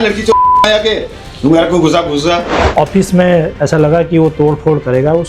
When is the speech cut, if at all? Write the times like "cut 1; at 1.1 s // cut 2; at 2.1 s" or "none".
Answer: cut 1; at 2.5 s